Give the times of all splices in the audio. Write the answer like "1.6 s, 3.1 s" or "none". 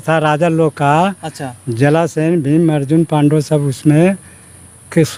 none